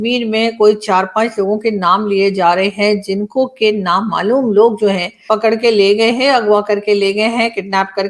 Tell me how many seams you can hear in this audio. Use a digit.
1